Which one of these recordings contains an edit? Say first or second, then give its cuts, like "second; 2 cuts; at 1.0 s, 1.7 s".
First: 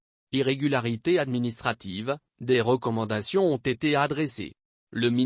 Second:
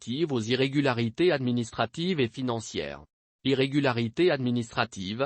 first; 1 cut; at 4.3 s